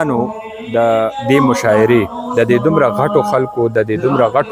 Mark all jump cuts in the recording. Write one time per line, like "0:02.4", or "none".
0:01.2